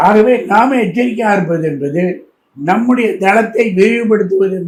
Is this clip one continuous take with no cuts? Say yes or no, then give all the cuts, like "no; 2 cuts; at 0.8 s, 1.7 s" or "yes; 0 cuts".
yes; 0 cuts